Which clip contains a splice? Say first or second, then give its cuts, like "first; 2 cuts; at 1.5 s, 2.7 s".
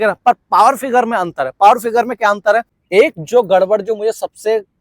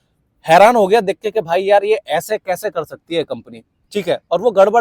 first; 1 cut; at 2.8 s